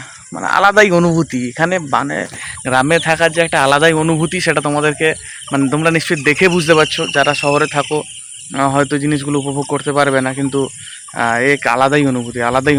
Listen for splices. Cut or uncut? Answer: uncut